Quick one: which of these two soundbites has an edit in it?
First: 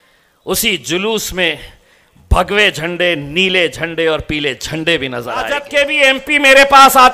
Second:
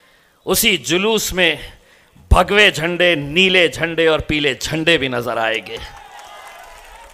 first; 1 cut; at 5.6 s

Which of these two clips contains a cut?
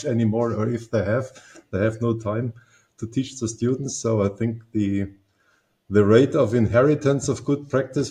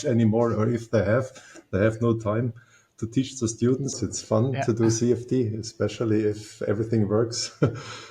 second; 1 cut; at 4.0 s

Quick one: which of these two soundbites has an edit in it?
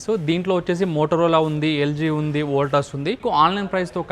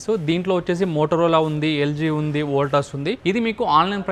first; 1 cut; at 3.2 s

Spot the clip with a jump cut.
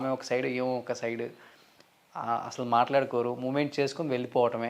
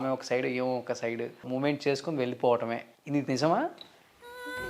second; 2 cuts; at 1.5 s, 2.9 s

